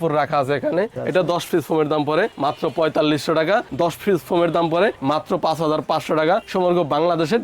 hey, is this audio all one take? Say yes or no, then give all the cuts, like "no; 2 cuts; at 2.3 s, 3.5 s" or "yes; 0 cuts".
no; 2 cuts; at 1.0 s, 3.7 s